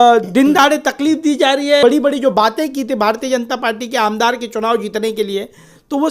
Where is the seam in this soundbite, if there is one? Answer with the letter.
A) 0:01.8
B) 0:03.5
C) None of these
A